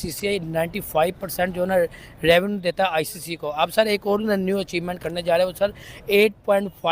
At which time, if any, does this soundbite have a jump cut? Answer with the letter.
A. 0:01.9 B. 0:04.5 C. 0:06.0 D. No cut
D